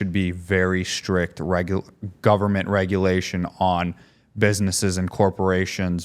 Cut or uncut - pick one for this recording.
uncut